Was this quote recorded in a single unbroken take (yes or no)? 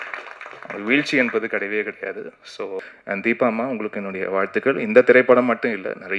no